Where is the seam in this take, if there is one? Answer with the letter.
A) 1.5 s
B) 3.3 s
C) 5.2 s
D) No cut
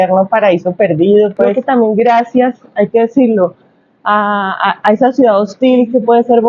A